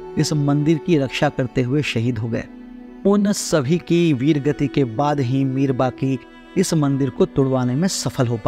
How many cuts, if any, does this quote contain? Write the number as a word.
zero